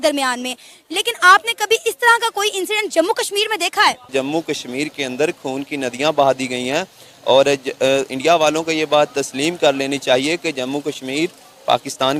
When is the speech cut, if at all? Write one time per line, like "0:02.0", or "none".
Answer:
none